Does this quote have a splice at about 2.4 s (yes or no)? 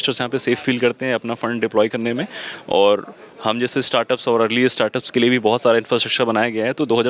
no